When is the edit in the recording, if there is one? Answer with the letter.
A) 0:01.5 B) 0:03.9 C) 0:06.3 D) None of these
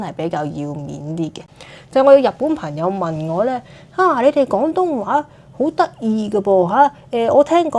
A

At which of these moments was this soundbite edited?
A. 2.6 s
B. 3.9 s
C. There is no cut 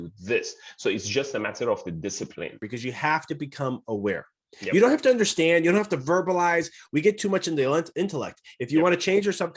A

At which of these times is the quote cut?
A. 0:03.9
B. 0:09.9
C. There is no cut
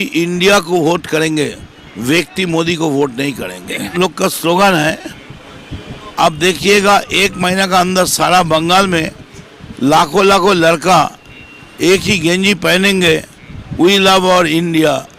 A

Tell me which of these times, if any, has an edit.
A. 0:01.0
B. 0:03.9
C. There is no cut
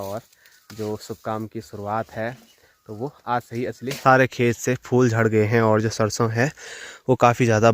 B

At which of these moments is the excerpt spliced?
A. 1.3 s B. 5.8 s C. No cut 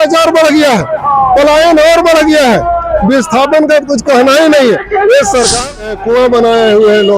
B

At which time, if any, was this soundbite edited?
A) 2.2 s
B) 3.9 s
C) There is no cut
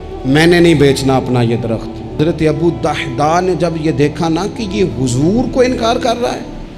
A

